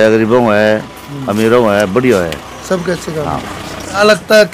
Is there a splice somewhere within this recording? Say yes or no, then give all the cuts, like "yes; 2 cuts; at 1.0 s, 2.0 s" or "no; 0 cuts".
no; 0 cuts